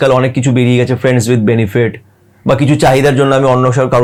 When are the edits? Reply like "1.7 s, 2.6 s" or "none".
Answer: none